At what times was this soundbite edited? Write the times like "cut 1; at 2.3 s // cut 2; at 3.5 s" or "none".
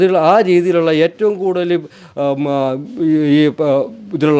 none